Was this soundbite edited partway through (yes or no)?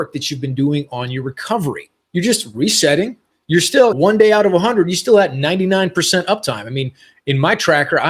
yes